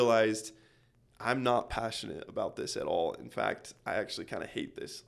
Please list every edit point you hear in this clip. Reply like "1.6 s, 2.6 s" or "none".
none